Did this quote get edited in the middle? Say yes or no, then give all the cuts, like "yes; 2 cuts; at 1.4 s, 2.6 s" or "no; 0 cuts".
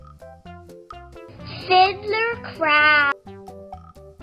yes; 2 cuts; at 1.0 s, 3.3 s